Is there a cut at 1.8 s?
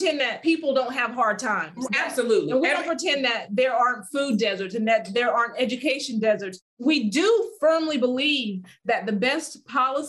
no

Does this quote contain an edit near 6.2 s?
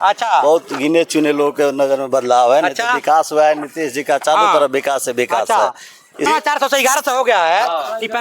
yes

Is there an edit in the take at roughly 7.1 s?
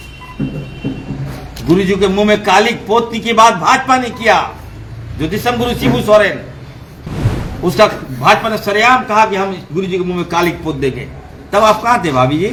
no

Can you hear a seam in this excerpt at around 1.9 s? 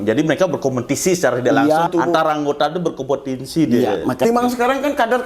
yes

